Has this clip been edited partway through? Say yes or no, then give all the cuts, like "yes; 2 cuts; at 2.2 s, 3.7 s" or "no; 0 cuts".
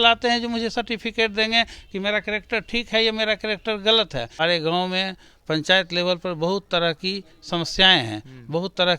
yes; 1 cut; at 4.4 s